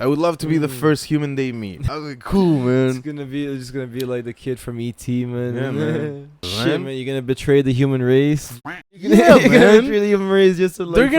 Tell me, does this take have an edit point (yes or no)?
yes